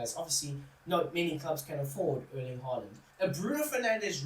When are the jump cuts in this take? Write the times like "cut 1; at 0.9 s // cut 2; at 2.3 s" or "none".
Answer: cut 1; at 3.0 s